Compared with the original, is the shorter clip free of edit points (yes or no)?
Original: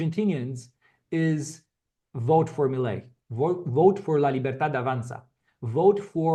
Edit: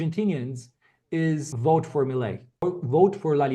no